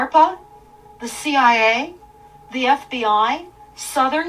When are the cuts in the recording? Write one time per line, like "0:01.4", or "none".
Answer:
none